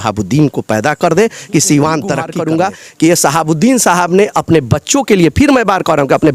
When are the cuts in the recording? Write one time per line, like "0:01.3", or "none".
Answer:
0:02.3

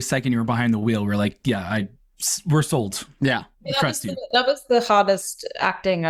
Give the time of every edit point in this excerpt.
none

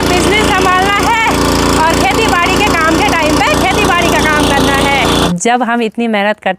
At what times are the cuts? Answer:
0:05.3

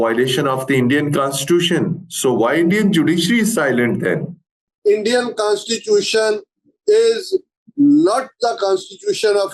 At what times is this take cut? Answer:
0:04.6

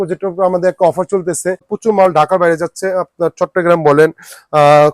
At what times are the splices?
0:01.7

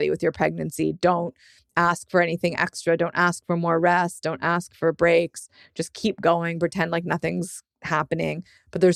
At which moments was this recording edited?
none

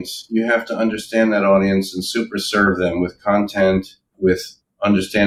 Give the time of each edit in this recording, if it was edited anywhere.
0:04.0

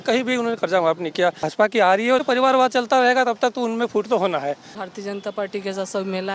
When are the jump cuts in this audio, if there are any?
0:01.5
0:02.2
0:04.7

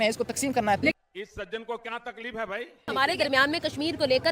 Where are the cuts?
0:02.8

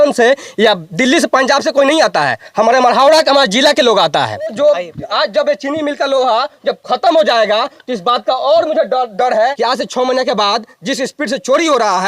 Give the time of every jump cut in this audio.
0:04.5
0:09.5

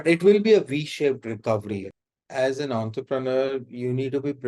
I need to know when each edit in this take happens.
0:01.9

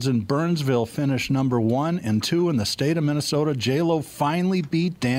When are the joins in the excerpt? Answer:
none

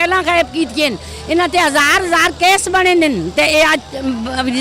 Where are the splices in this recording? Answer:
none

